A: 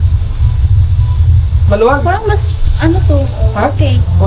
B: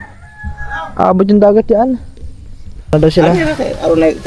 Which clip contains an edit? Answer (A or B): B